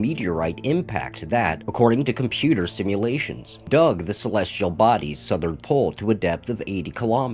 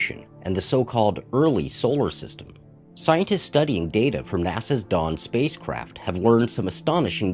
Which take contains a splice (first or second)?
second